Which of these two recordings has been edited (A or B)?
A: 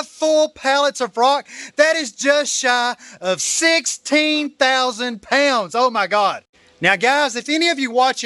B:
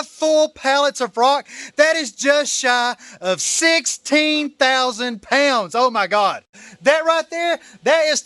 B